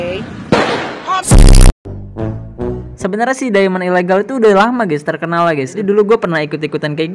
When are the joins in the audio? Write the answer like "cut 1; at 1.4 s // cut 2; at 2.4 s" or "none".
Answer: cut 1; at 2.8 s // cut 2; at 5.8 s